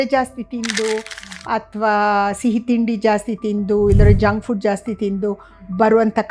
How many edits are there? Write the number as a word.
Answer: zero